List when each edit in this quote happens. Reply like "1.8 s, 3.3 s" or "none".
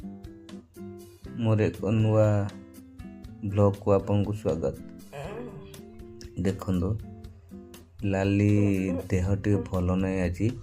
1.1 s